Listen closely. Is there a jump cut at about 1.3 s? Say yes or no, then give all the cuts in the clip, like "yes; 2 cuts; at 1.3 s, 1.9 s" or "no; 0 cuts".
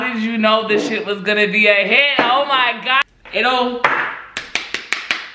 no; 1 cut; at 3.0 s